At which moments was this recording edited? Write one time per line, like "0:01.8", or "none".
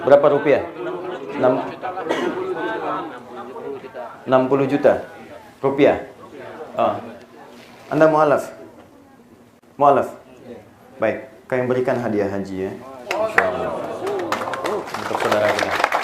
0:01.1